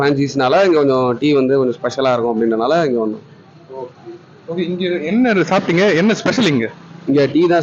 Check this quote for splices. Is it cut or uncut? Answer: uncut